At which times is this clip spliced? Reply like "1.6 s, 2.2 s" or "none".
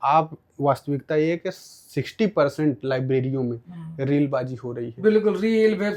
none